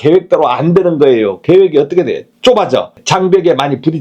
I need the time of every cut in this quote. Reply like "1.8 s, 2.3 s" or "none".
2.3 s, 3.0 s